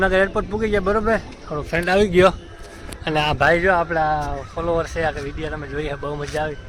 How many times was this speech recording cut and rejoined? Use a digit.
0